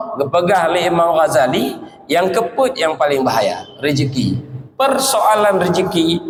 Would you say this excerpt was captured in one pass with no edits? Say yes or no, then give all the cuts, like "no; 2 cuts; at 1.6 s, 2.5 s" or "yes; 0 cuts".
yes; 0 cuts